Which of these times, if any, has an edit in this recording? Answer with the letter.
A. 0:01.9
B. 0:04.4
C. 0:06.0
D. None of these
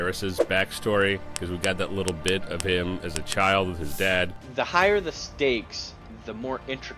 B